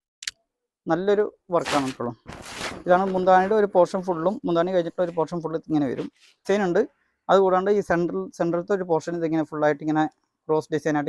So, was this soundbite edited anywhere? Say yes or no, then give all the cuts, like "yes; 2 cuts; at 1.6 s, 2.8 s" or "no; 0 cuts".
yes; 1 cut; at 6.4 s